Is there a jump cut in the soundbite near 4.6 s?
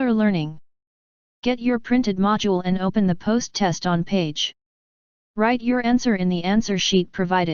no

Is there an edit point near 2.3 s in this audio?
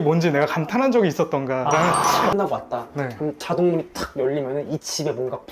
yes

